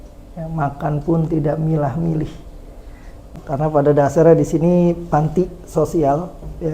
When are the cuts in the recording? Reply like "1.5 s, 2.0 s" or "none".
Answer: 3.3 s